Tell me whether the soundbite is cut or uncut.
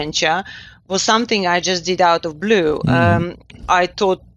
uncut